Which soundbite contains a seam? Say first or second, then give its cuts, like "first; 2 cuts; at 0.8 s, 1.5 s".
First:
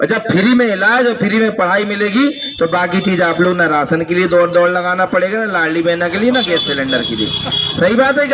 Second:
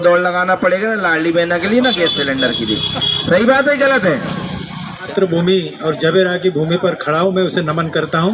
second; 1 cut; at 5.1 s